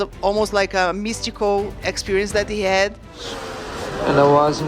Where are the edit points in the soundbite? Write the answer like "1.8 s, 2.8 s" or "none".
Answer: 3.2 s